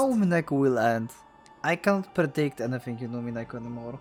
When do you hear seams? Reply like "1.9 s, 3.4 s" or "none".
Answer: none

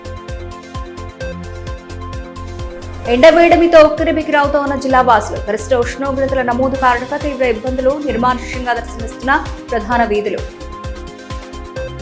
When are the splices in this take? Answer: 1.3 s

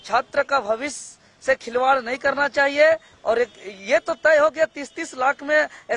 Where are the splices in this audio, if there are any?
3.1 s

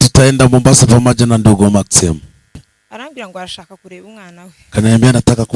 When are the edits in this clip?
2.7 s

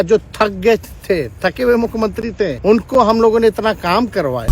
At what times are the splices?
2.6 s

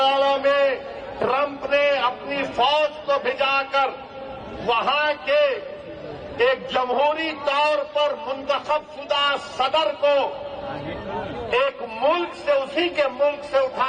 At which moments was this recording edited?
none

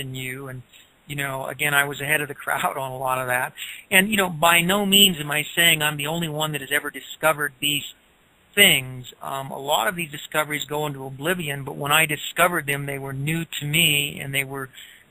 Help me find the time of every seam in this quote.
none

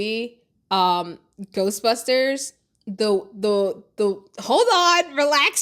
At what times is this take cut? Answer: none

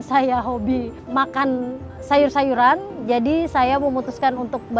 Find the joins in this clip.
1.0 s

